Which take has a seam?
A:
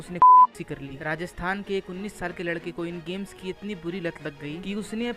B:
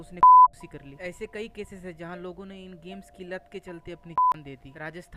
A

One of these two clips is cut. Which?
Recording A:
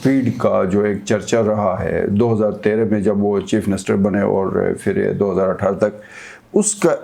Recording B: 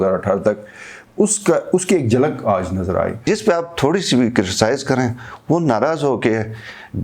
B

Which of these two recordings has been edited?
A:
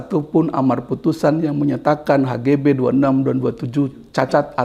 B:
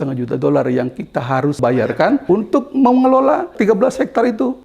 B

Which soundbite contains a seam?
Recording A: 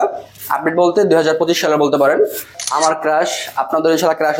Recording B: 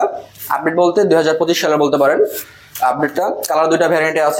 A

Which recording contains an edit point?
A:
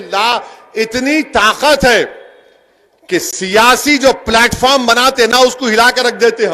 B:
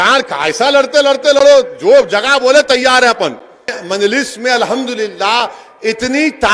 B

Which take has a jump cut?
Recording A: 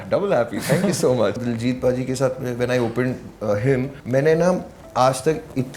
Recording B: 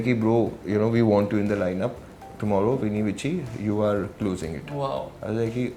A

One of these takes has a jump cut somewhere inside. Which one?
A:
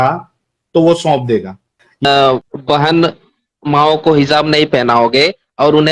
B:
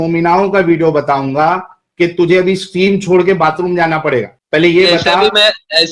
A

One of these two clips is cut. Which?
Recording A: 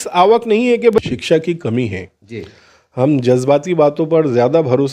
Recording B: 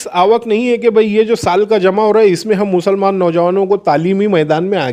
A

